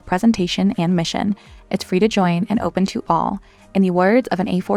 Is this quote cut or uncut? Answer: uncut